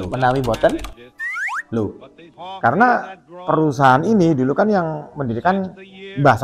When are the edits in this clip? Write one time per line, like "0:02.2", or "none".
0:02.4